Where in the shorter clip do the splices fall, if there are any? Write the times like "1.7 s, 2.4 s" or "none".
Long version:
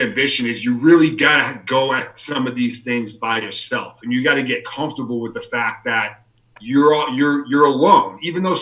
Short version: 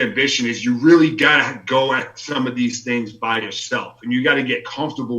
none